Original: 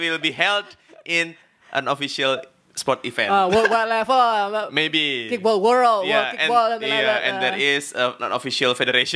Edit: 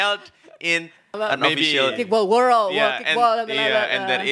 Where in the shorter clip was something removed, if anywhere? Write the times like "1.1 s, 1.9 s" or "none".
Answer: 1.9 s

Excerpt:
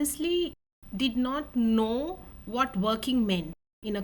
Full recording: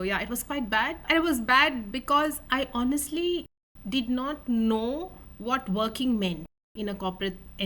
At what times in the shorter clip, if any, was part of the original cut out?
none

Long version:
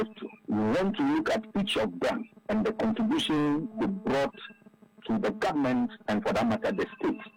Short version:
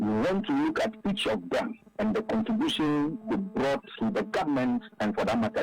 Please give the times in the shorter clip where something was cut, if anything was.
3.9 s

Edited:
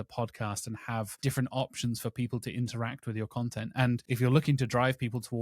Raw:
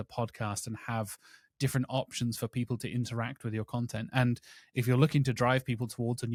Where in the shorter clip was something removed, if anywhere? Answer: 1.1 s, 4.0 s

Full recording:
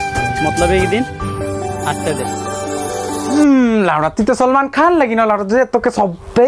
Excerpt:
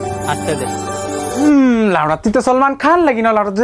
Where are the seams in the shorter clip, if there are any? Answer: 1.4 s

